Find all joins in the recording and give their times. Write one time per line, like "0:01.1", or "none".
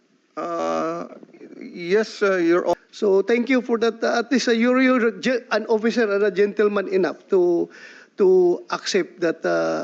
0:02.7